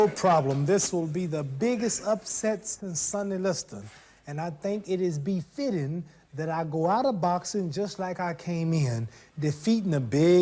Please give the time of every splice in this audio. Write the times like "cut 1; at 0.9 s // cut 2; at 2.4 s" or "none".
cut 1; at 5.5 s